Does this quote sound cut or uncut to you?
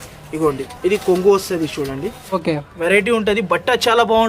cut